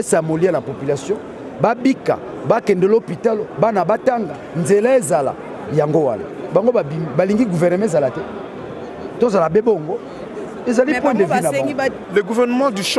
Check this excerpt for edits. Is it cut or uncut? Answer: cut